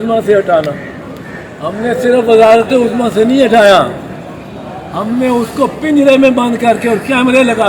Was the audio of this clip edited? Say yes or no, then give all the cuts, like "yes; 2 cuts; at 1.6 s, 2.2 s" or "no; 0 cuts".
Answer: no; 0 cuts